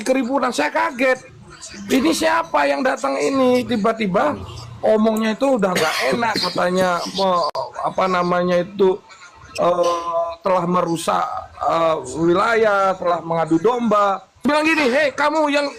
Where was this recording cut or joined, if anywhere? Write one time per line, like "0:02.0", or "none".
0:14.5